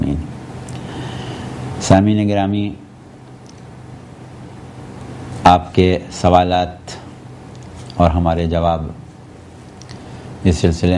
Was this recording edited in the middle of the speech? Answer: no; 0 cuts

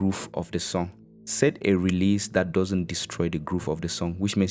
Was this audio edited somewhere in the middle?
yes; 1 cut; at 1.0 s

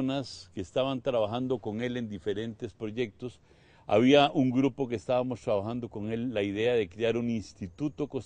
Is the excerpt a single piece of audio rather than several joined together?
yes; 0 cuts

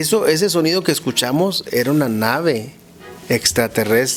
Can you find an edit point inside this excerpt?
no; 0 cuts

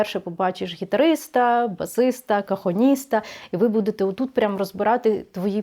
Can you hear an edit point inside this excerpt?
no; 0 cuts

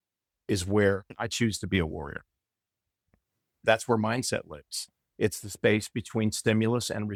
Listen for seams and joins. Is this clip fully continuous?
yes; 0 cuts

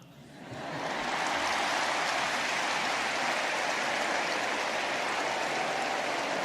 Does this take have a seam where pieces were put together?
no; 0 cuts

